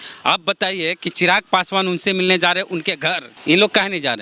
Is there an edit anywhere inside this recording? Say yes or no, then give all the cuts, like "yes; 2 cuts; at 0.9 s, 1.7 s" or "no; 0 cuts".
yes; 1 cut; at 3.3 s